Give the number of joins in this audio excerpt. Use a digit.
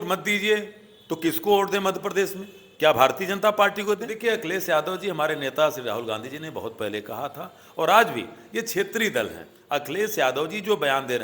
2